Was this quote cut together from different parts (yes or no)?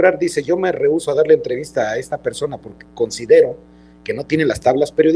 no